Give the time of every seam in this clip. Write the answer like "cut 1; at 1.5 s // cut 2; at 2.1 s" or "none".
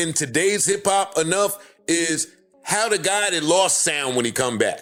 none